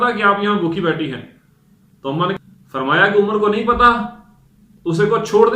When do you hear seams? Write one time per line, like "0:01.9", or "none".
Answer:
0:02.4